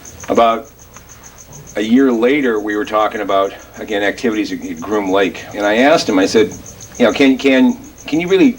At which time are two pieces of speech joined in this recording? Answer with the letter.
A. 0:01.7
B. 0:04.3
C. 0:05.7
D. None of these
C